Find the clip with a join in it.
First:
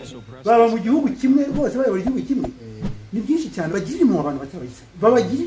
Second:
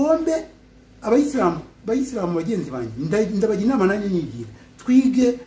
first; 1 cut; at 3.7 s

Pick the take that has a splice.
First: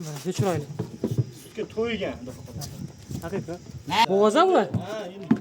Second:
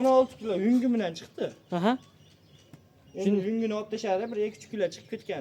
first; 1 cut; at 4.1 s

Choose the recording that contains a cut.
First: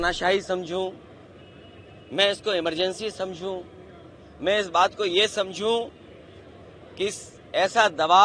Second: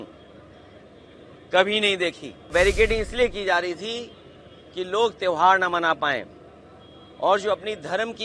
second; 1 cut; at 2.5 s

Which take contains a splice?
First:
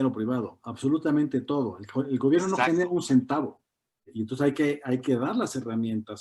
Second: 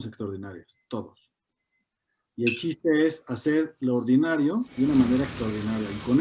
first; 1 cut; at 4.1 s

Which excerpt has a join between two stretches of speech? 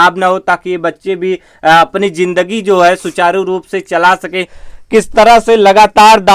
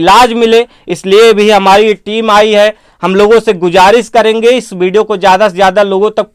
first; 1 cut; at 4.5 s

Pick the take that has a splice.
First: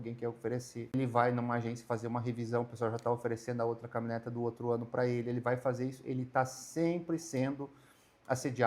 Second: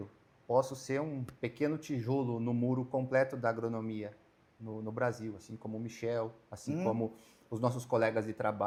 first; 1 cut; at 0.9 s

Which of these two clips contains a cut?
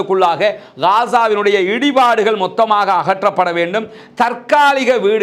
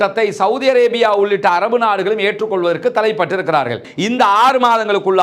second; 1 cut; at 3.9 s

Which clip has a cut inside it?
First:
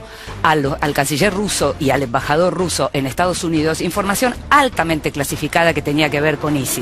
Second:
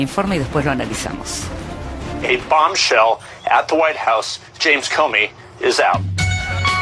first; 1 cut; at 1.9 s

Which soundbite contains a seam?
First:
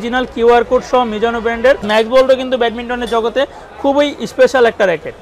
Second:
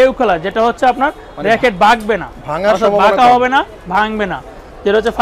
first; 1 cut; at 1.9 s

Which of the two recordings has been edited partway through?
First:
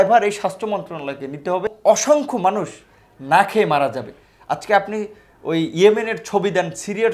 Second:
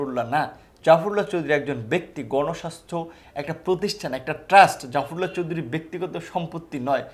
first; 1 cut; at 1.7 s

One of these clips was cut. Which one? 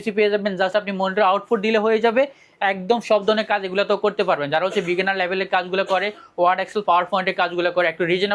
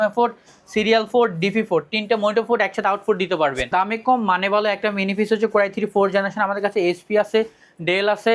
second; 1 cut; at 3.6 s

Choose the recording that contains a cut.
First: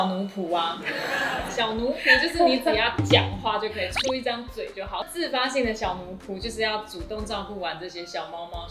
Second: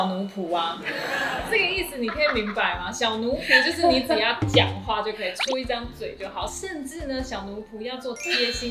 first; 2 cuts; at 1.5 s, 5.1 s

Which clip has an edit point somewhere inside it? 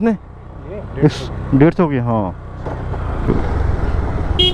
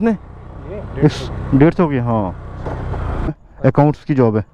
second; 1 cut; at 3.3 s

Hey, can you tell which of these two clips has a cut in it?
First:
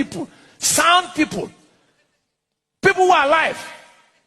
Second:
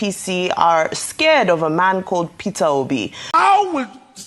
second; 1 cut; at 3.2 s

